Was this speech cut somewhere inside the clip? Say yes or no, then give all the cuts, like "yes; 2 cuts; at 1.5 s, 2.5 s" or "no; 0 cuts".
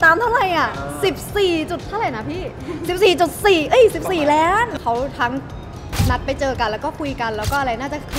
yes; 1 cut; at 4.7 s